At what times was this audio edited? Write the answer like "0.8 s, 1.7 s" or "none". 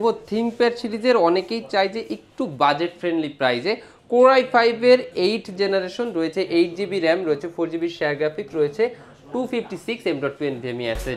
none